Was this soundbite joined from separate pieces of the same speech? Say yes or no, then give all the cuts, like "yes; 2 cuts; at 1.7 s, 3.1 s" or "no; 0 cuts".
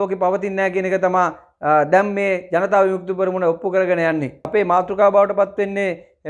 no; 0 cuts